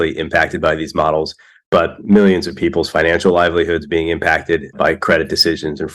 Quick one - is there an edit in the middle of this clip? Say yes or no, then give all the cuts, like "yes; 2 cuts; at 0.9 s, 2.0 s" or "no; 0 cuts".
yes; 1 cut; at 4.7 s